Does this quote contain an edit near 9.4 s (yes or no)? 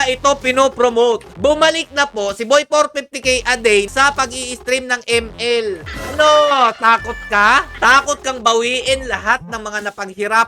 no